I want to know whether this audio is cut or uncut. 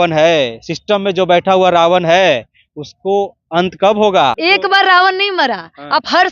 cut